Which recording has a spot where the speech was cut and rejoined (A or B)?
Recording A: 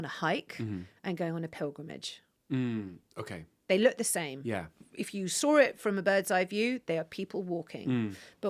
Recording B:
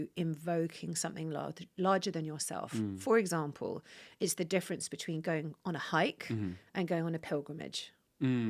A